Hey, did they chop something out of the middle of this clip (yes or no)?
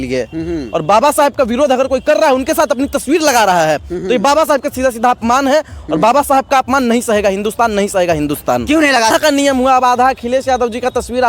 yes